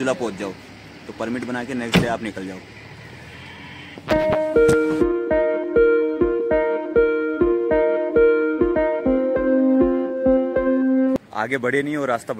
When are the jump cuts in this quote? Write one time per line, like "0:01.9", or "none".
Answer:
none